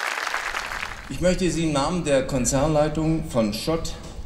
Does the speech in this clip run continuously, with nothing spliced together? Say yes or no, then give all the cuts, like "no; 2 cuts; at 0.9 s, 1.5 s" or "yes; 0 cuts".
no; 1 cut; at 0.9 s